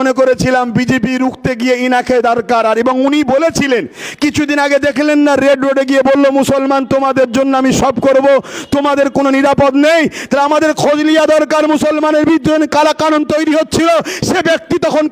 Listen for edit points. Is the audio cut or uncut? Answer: uncut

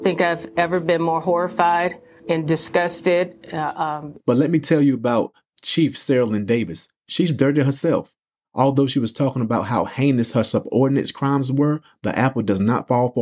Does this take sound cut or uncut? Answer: cut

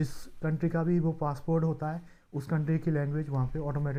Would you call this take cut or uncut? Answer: uncut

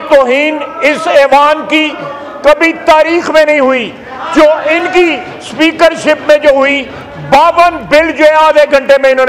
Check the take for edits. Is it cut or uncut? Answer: uncut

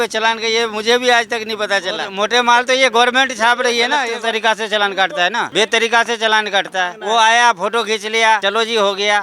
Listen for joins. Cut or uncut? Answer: cut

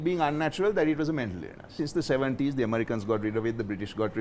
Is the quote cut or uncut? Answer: cut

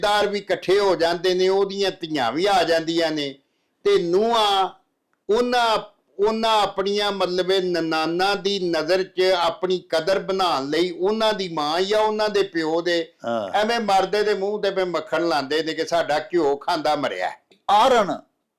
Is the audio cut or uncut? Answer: cut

